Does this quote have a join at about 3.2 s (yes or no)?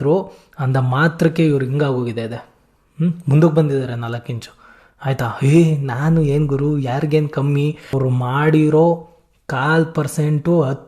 no